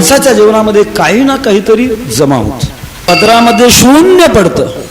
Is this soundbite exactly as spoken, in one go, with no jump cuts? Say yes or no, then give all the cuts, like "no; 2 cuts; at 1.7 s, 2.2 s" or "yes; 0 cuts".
no; 1 cut; at 3.0 s